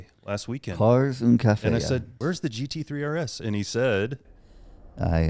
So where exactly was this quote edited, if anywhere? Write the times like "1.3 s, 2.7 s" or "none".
2.1 s, 4.3 s